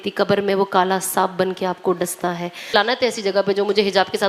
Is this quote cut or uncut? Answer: cut